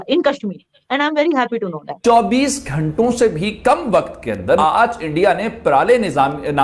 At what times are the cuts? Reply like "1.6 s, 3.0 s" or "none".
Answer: 1.9 s, 4.6 s